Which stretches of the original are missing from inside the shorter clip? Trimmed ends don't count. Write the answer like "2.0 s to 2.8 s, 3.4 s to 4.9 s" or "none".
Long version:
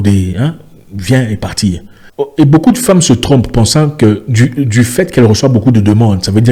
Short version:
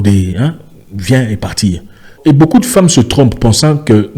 2.2 s to 2.3 s